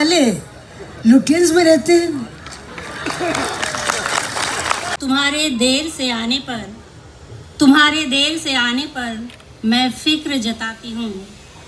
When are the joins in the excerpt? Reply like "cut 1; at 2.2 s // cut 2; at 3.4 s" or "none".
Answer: cut 1; at 4.9 s